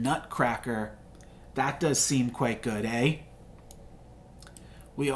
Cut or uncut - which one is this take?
uncut